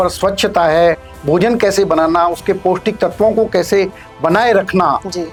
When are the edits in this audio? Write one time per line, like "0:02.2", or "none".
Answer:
none